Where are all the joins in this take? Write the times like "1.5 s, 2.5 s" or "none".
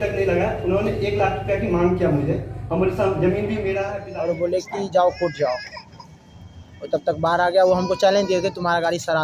4.0 s